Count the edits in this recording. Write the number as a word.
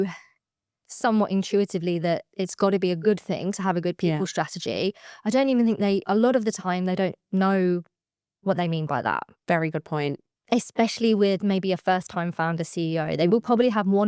one